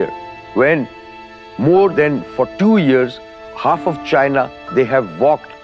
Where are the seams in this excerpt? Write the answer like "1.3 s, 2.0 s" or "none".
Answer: none